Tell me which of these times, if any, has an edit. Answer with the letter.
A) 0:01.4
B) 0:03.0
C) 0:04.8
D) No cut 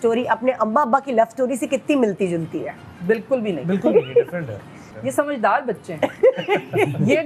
C